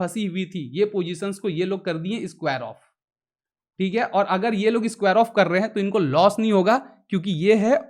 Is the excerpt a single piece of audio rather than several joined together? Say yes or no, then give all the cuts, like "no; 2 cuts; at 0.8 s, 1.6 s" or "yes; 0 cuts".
yes; 0 cuts